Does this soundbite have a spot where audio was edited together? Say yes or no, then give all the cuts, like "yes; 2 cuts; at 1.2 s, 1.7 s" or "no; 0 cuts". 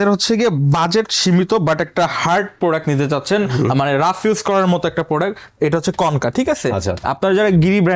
no; 0 cuts